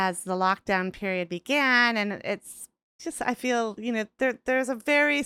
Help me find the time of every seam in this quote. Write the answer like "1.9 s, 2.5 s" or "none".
3.0 s